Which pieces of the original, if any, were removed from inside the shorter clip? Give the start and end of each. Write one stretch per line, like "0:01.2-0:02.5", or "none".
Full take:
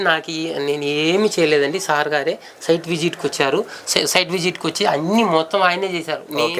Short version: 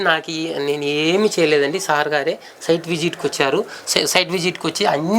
none